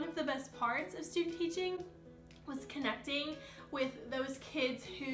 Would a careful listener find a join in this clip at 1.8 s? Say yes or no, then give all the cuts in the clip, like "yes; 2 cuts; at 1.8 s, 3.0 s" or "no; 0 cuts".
no; 0 cuts